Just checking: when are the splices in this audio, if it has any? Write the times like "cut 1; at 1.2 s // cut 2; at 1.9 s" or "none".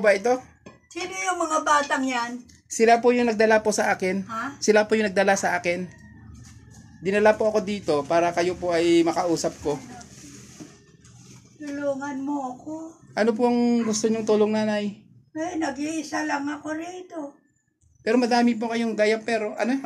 none